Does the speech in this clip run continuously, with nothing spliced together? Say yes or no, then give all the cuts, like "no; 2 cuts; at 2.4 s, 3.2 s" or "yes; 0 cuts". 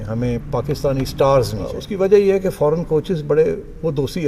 no; 1 cut; at 1.8 s